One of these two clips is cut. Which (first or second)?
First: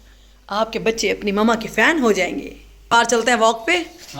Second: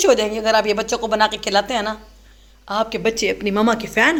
first